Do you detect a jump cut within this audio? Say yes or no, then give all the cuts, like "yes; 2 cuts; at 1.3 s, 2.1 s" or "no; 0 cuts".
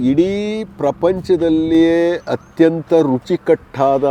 no; 0 cuts